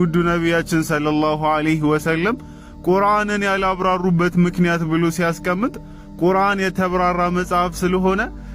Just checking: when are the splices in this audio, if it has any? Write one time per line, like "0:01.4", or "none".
none

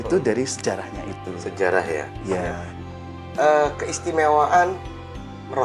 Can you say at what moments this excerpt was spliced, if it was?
0:02.7

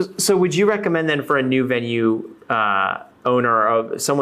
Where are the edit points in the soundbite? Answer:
none

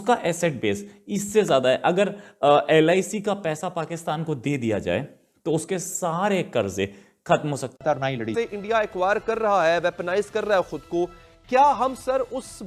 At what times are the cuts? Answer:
none

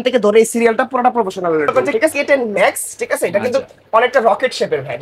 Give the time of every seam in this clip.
0:02.1

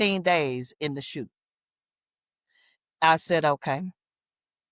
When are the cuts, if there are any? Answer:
none

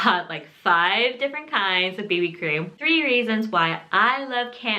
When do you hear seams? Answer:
0:02.7

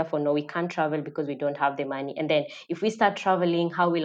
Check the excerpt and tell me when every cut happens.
none

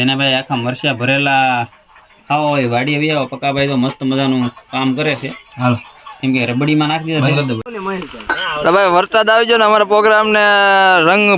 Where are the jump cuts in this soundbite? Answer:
0:07.7

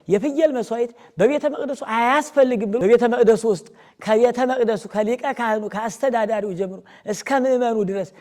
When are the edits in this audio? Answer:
0:02.8

